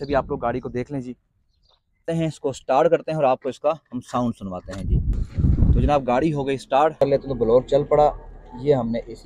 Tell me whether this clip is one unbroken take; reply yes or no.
no